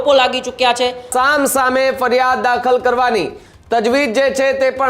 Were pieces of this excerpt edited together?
yes; 1 cut; at 1.1 s

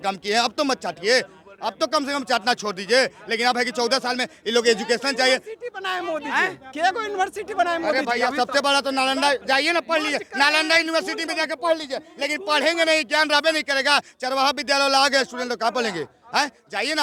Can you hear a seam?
no; 0 cuts

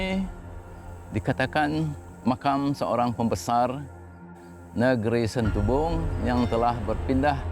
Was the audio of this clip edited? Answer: yes; 1 cut; at 6.1 s

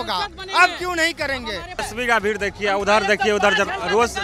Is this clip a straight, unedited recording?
no; 1 cut; at 1.8 s

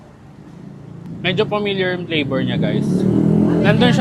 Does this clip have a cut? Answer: yes; 1 cut; at 1.1 s

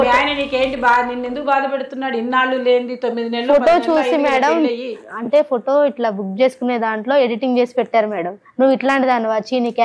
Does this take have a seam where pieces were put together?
no; 0 cuts

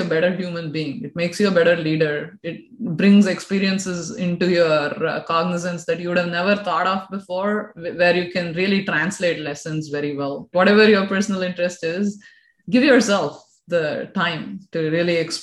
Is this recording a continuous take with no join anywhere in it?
no; 1 cut; at 10.5 s

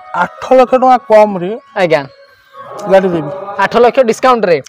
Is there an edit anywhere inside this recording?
no; 0 cuts

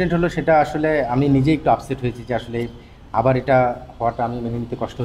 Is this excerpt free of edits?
yes; 0 cuts

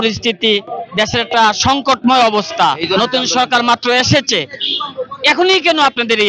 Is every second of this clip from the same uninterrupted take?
yes; 0 cuts

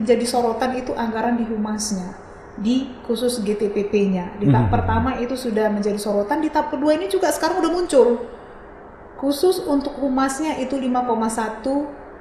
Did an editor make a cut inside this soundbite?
no; 0 cuts

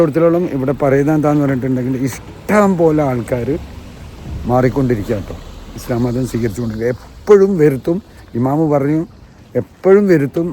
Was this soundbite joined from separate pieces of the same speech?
no; 0 cuts

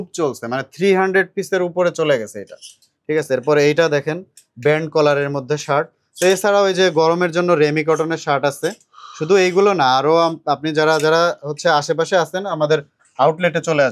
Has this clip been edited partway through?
no; 0 cuts

